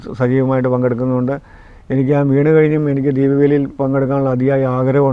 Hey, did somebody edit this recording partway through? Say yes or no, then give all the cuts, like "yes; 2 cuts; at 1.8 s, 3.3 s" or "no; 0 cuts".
no; 0 cuts